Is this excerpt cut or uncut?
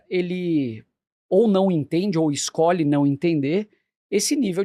uncut